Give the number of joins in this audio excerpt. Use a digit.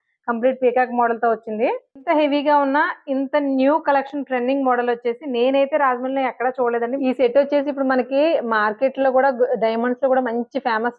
2